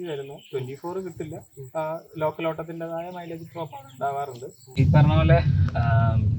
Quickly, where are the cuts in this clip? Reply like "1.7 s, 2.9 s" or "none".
4.7 s